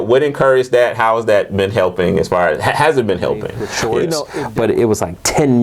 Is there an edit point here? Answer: yes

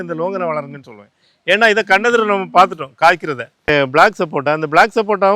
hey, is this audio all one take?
no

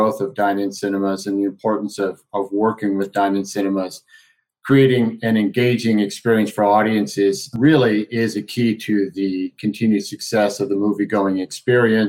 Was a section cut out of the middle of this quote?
no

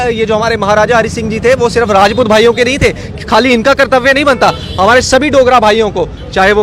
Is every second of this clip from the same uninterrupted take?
yes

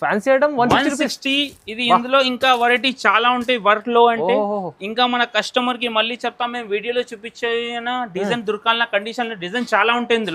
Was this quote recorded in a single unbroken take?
yes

